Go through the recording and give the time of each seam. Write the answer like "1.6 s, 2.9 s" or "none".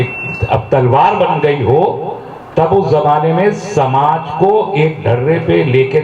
none